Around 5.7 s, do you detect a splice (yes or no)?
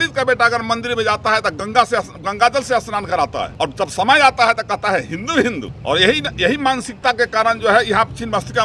yes